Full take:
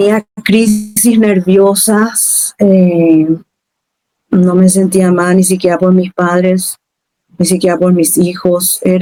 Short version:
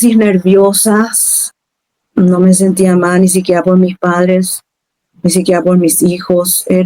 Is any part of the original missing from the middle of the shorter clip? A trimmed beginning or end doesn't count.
yes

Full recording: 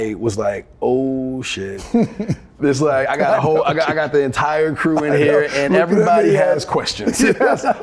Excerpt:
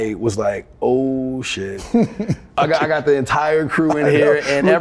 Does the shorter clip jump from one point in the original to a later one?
yes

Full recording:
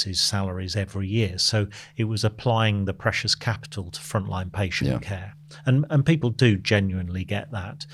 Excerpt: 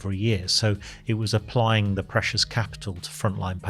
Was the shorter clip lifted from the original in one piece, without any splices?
yes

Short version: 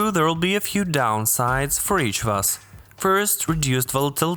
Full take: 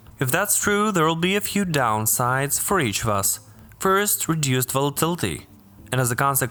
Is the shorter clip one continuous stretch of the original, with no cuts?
yes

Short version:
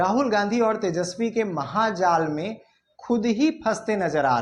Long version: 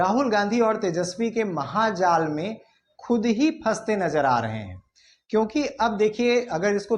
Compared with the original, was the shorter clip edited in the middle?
no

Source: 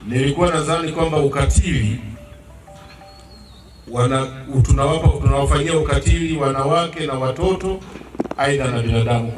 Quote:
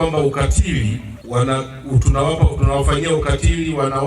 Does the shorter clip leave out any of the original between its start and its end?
yes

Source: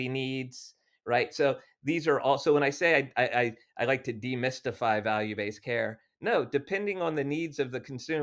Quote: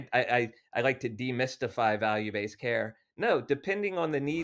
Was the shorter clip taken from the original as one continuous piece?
yes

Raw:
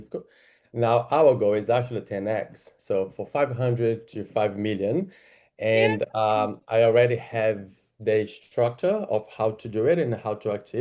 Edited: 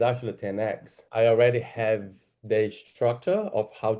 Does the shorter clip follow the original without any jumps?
no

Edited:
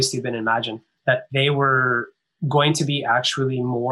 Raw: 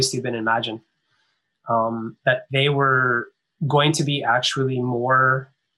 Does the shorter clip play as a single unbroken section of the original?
no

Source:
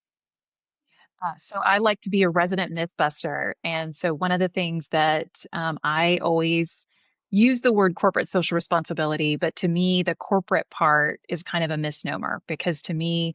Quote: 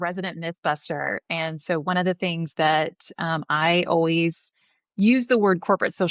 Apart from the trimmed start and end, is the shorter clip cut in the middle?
no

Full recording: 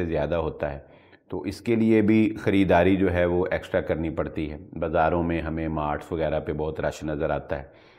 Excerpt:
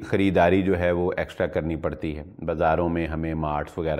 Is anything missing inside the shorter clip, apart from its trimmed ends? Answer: no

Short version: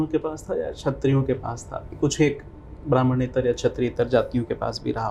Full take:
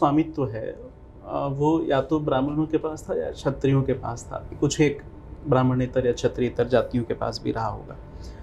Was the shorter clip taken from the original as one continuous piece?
yes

